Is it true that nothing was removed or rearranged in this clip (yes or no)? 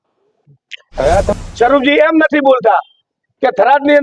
no